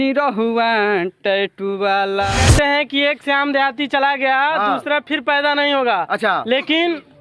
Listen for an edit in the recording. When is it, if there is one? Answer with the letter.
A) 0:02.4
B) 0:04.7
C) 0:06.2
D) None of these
A